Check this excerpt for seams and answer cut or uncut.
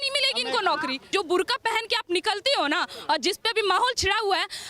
cut